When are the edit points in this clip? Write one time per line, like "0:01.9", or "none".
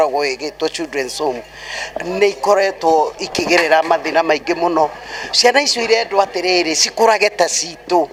none